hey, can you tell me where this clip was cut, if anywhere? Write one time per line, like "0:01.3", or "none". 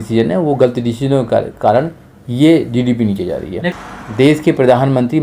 0:03.7